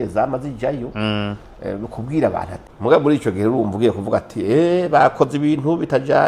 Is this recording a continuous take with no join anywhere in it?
no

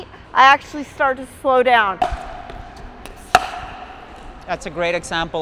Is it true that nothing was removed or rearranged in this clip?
no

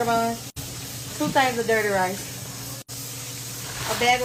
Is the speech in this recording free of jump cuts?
yes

